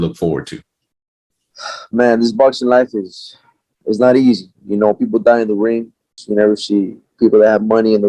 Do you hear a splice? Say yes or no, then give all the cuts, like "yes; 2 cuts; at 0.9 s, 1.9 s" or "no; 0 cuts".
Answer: yes; 1 cut; at 6.2 s